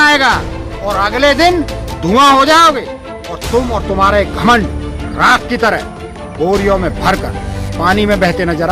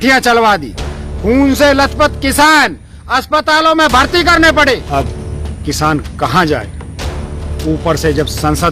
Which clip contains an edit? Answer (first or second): second